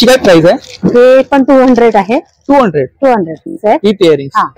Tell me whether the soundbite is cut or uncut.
cut